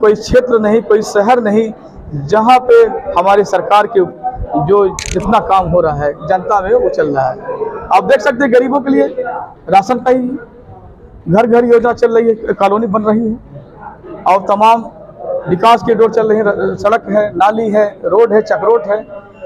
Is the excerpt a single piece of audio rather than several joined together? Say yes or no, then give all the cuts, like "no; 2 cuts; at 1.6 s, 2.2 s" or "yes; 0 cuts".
yes; 0 cuts